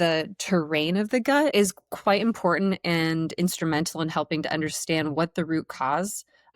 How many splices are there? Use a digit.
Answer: 1